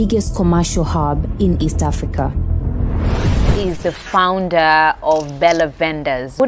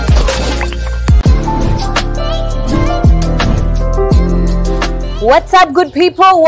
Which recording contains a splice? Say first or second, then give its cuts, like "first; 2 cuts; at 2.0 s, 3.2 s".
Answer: second; 1 cut; at 1.2 s